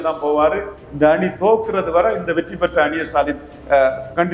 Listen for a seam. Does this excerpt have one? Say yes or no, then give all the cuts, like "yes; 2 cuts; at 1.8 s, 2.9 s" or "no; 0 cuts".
no; 0 cuts